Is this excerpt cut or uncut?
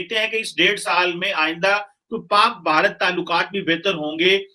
uncut